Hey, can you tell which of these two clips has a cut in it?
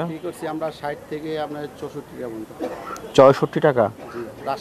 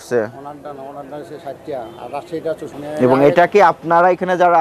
second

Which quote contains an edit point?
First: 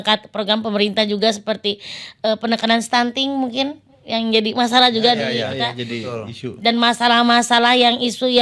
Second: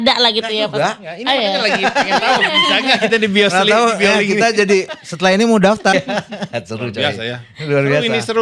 second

